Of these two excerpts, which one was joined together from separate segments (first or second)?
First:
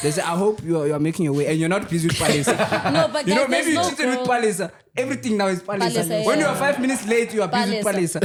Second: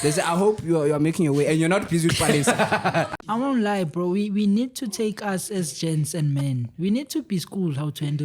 second